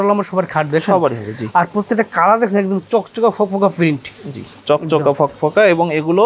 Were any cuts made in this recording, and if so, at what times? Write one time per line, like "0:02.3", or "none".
none